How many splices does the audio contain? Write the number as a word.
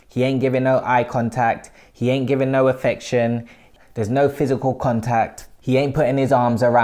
zero